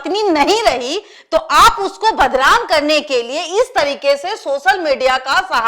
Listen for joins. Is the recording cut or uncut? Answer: uncut